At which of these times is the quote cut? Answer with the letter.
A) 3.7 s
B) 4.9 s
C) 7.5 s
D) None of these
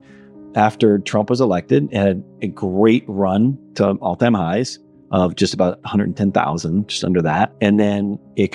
C